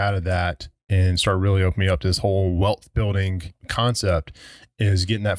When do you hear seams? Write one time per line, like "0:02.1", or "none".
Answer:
0:03.6